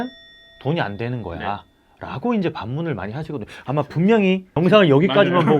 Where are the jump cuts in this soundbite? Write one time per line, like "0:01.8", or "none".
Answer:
0:04.5